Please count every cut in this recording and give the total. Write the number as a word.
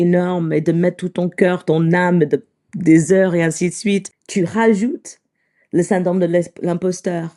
one